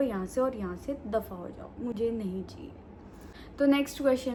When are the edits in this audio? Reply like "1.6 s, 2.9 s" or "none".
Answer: none